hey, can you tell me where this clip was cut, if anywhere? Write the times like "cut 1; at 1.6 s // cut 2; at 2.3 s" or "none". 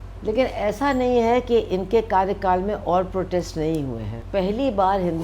cut 1; at 4.1 s